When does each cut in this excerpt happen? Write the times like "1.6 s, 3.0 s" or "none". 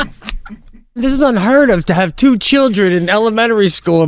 1.0 s